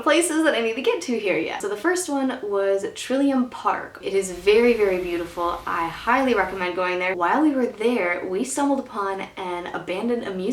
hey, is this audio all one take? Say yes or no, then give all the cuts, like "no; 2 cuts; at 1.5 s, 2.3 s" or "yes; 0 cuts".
no; 2 cuts; at 3.9 s, 7.1 s